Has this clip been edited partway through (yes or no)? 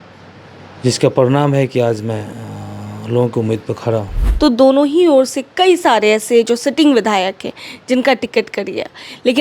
yes